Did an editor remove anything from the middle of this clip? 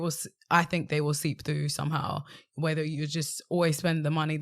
no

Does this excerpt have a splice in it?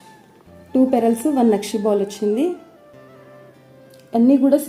no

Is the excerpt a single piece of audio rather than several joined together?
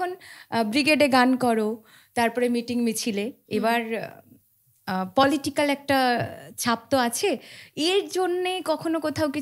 yes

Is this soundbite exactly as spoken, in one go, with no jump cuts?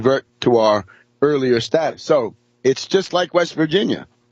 yes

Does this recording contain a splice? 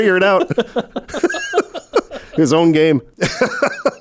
yes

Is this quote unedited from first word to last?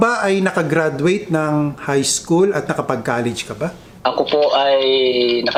yes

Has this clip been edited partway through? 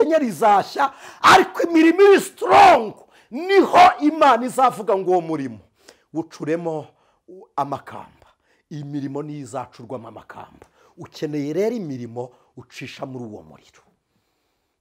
no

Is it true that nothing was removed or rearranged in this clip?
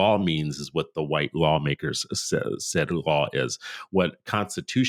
yes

